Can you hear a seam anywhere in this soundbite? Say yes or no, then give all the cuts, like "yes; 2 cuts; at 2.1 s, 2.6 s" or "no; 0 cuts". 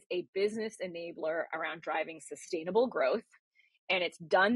no; 0 cuts